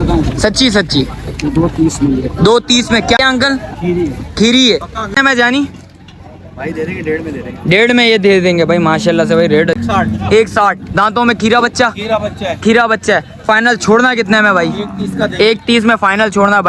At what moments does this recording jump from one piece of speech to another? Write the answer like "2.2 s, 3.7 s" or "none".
3.2 s, 5.2 s, 9.8 s